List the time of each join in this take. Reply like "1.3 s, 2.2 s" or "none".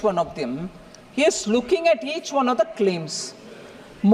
none